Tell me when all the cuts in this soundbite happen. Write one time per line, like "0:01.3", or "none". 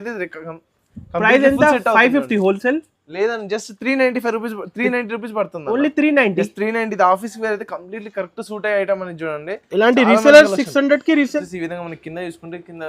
0:11.4

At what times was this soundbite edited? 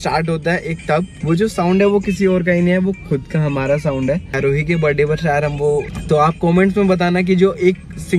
0:01.1
0:04.4
0:05.9

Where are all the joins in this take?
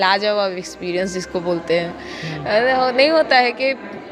none

